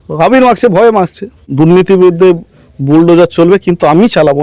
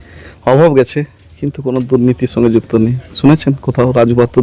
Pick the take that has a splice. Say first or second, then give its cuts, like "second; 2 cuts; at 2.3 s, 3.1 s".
first; 1 cut; at 1.4 s